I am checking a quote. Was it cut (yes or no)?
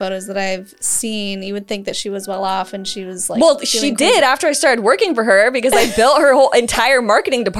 no